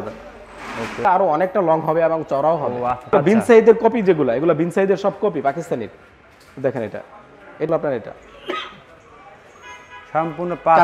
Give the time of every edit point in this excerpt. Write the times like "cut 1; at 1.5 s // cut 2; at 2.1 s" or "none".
cut 1; at 1.0 s // cut 2; at 3.1 s // cut 3; at 7.7 s

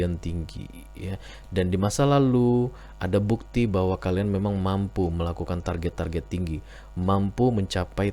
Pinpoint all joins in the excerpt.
none

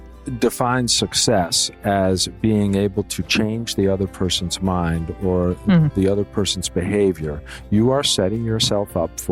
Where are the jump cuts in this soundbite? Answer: none

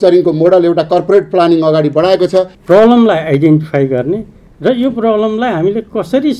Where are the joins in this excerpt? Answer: cut 1; at 2.6 s

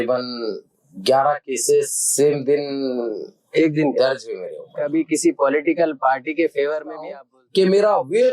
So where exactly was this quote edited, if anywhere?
cut 1; at 4.3 s // cut 2; at 7.1 s

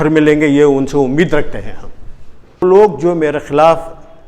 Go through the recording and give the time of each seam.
cut 1; at 2.6 s

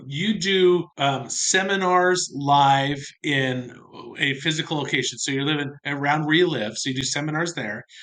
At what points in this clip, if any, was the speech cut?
cut 1; at 0.9 s // cut 2; at 3.1 s

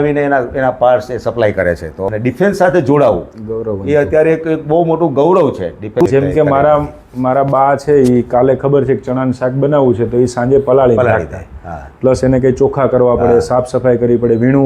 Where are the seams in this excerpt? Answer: cut 1; at 1.9 s // cut 2; at 6.1 s

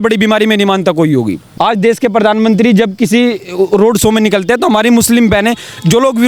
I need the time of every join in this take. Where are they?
cut 1; at 1.4 s

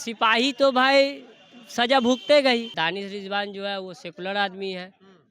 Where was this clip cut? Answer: cut 1; at 2.7 s

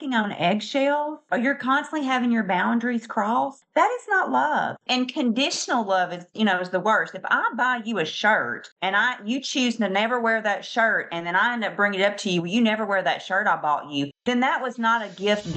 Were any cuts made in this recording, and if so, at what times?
cut 1; at 1.2 s // cut 2; at 4.8 s // cut 3; at 8.6 s // cut 4; at 14.2 s

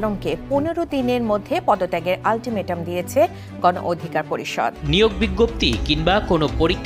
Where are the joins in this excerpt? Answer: cut 1; at 4.8 s

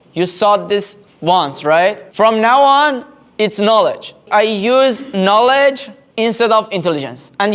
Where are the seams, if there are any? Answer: cut 1; at 4.2 s

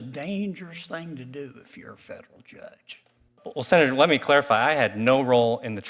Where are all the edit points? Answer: cut 1; at 3.4 s

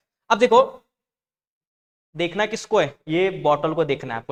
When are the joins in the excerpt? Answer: none

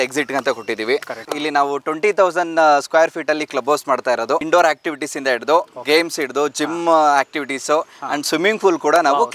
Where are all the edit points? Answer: cut 1; at 1.2 s // cut 2; at 4.4 s

